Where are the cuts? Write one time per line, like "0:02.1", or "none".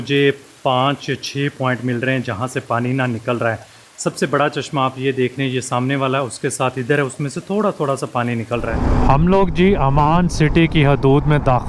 0:08.8